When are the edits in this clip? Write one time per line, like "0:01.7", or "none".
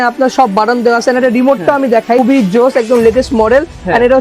0:02.2